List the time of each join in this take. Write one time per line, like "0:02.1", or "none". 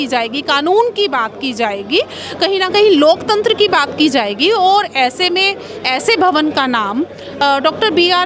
none